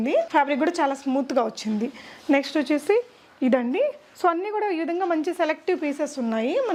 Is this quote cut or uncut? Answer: uncut